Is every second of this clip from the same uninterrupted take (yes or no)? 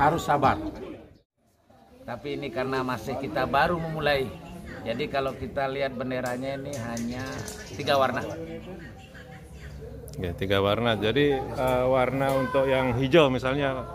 no